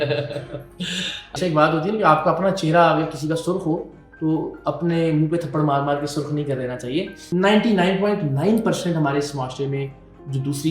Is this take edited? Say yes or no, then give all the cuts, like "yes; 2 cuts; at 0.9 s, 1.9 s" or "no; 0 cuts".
yes; 2 cuts; at 1.3 s, 7.3 s